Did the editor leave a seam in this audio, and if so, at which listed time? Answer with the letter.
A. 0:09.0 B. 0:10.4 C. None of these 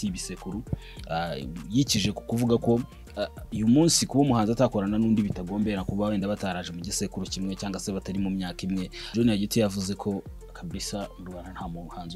A